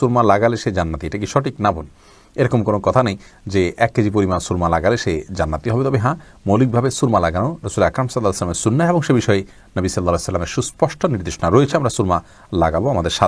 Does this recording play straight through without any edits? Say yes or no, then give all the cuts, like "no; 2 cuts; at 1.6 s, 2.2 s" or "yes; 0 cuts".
yes; 0 cuts